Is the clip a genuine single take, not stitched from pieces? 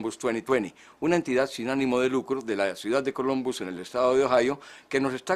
yes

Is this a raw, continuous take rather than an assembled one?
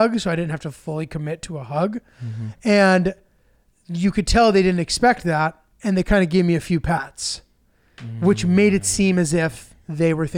yes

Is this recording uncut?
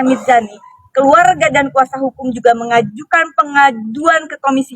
no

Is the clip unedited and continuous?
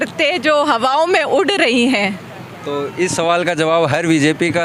yes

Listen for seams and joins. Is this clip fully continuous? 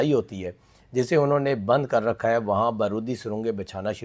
yes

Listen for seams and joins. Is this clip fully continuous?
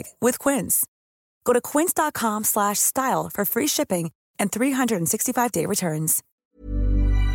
no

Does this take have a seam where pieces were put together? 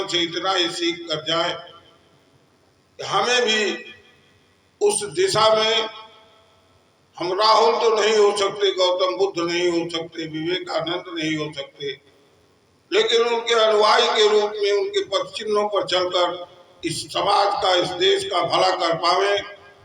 no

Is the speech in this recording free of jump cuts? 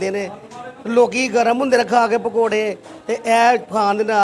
yes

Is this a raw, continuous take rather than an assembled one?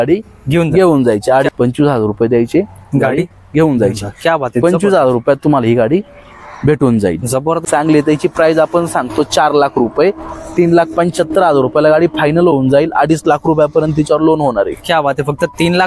no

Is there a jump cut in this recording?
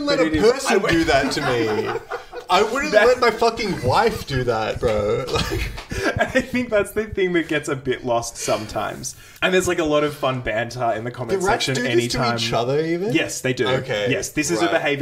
yes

